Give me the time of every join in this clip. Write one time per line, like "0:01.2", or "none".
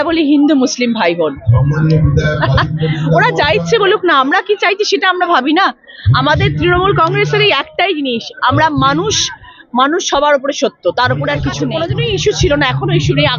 0:11.7

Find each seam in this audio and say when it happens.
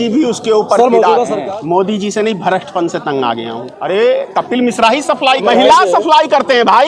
0:01.4
0:03.7
0:05.4

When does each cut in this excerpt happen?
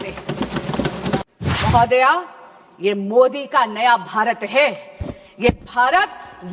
0:01.3

